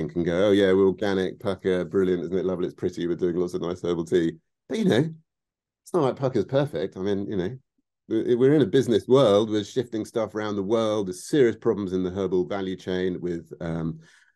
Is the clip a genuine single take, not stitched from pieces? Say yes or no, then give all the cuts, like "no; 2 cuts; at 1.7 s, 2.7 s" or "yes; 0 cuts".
yes; 0 cuts